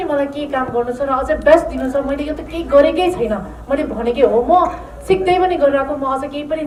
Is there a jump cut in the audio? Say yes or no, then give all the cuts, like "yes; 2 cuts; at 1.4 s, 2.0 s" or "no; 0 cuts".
no; 0 cuts